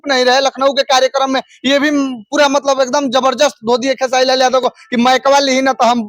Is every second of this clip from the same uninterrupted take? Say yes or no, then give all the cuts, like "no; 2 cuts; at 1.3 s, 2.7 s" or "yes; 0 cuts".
yes; 0 cuts